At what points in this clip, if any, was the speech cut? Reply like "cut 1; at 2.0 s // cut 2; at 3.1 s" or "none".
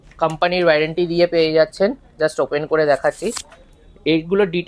none